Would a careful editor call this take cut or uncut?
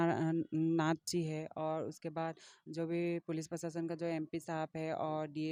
uncut